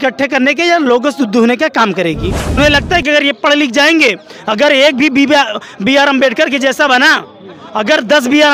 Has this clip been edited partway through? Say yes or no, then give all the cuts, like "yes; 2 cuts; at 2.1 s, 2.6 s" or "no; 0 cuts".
yes; 1 cut; at 2.6 s